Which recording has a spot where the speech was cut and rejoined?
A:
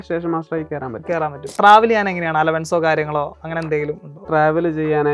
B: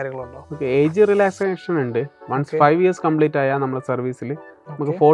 A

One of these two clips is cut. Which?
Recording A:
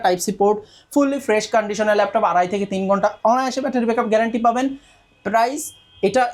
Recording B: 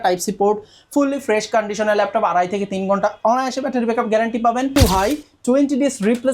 B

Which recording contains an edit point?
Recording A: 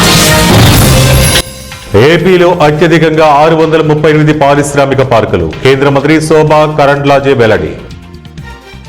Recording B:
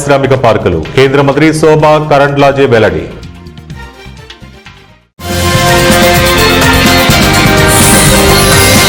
A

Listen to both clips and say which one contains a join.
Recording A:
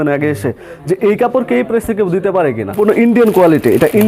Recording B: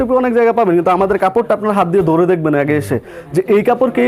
A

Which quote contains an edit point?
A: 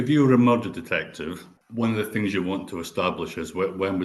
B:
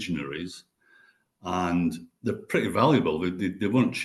A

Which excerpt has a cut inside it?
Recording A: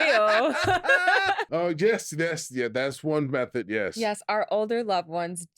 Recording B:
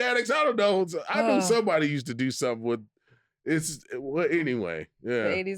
A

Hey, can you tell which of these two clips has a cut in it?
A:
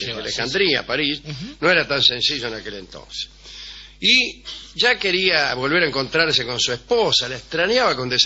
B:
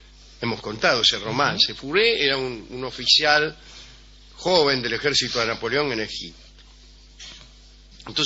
A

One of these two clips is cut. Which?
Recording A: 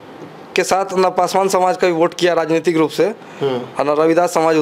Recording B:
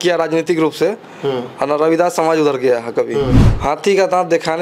B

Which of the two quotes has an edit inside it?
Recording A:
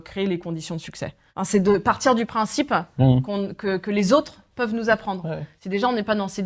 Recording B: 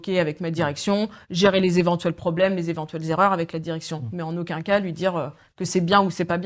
A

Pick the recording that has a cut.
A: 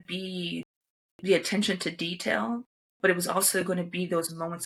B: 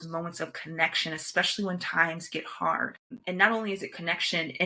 B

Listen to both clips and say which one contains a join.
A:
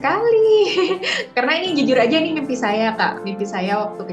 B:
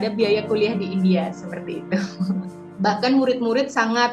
B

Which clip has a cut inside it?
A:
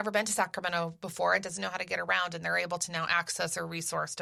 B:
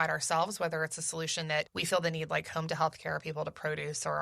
B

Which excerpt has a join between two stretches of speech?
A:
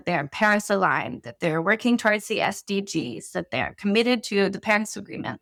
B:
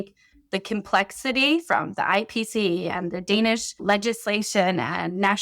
B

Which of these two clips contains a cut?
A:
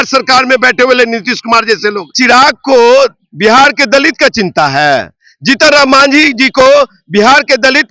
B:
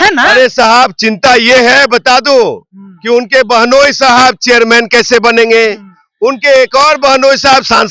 A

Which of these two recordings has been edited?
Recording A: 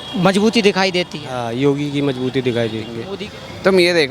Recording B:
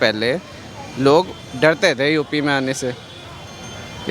A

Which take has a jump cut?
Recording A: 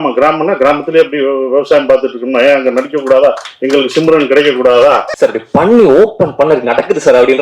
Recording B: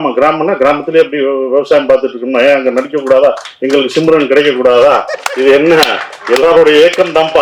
A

